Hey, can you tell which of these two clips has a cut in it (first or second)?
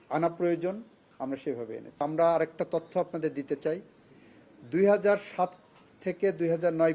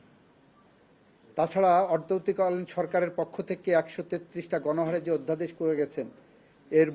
first